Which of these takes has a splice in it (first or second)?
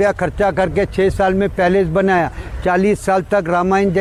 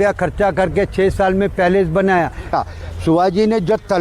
second